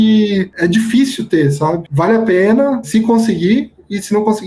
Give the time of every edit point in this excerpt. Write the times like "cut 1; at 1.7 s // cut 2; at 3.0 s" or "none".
cut 1; at 1.8 s // cut 2; at 2.9 s